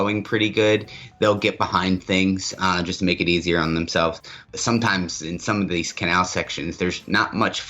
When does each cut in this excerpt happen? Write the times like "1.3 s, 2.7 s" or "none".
4.3 s